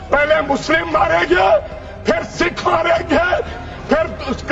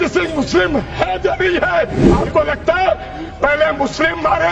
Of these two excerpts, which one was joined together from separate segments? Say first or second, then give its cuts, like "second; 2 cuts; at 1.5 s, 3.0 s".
second; 1 cut; at 2.1 s